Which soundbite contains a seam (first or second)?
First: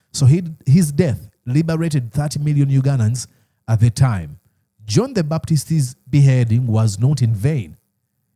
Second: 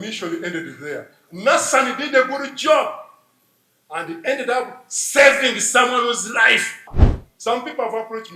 second